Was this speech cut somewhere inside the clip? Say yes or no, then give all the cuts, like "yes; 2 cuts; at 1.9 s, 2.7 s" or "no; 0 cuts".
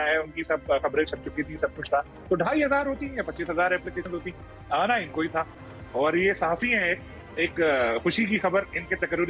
no; 0 cuts